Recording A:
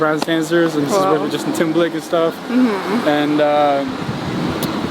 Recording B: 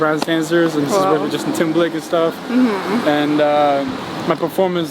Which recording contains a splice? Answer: B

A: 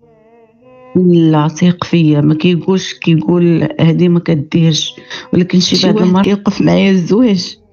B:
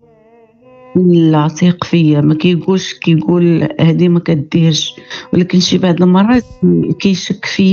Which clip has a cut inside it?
A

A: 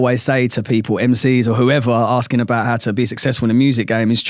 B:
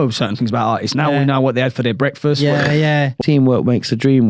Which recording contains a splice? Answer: B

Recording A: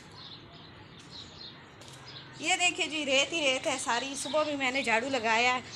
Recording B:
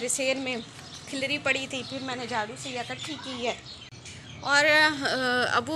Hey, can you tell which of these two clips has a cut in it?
B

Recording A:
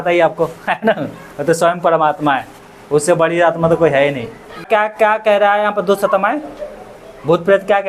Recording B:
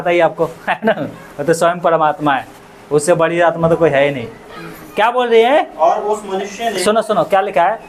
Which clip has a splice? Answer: A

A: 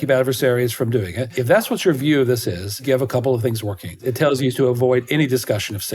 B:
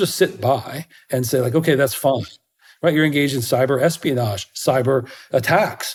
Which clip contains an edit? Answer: A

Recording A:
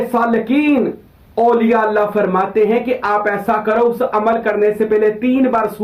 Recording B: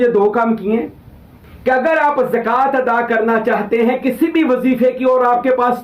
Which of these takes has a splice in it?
B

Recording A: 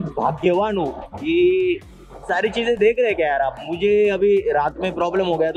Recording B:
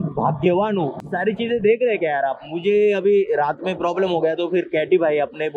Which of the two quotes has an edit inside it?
B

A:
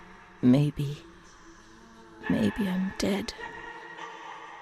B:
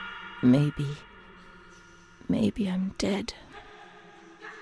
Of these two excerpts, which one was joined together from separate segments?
A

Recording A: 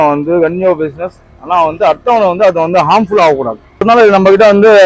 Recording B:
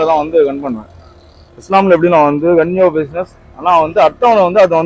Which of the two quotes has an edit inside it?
A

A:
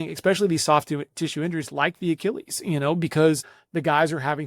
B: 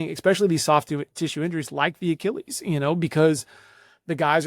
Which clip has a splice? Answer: A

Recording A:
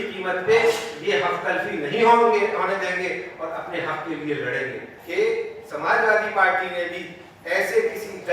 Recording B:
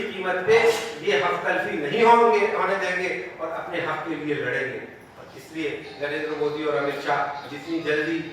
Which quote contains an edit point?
A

